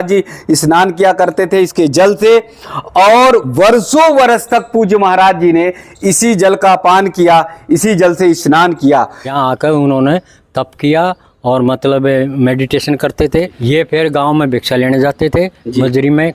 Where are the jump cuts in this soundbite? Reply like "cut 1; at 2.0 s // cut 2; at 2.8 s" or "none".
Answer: cut 1; at 9.3 s // cut 2; at 13.6 s